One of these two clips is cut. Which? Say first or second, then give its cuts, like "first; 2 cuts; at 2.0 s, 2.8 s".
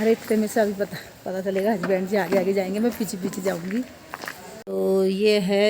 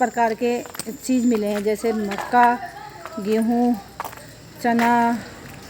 first; 1 cut; at 4.5 s